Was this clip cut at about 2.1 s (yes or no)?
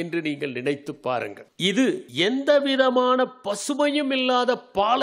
yes